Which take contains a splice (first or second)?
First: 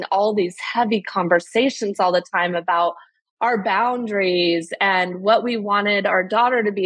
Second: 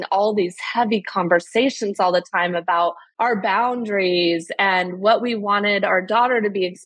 second